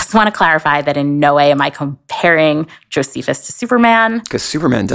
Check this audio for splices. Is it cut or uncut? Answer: uncut